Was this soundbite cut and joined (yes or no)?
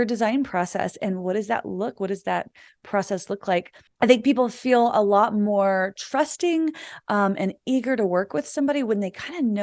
yes